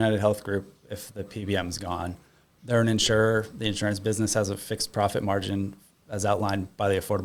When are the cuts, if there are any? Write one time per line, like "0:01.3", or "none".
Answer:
none

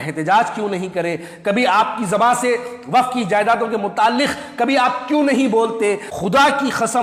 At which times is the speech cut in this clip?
0:06.1

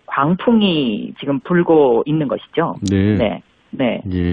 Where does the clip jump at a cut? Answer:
0:01.9

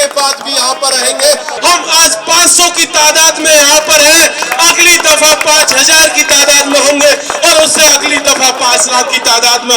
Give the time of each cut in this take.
0:01.5

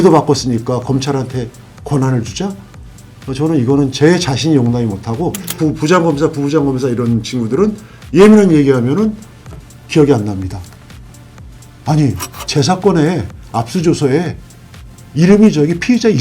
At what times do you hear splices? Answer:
0:05.6

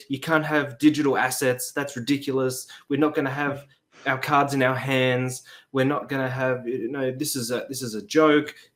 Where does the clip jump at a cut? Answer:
none

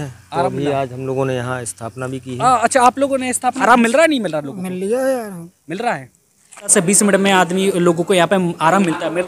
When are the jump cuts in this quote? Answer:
0:03.6
0:06.7

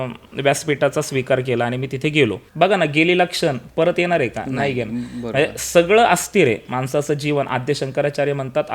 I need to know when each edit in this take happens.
0:02.4

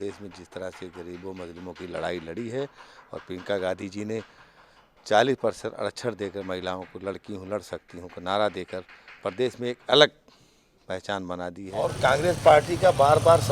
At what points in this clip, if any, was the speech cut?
0:11.8

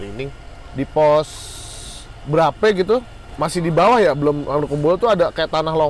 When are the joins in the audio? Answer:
0:03.2

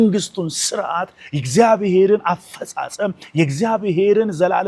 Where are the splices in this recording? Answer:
none

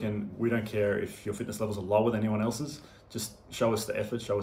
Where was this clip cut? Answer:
none

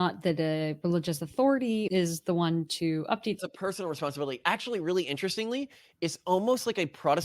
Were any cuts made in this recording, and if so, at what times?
0:01.9
0:03.4

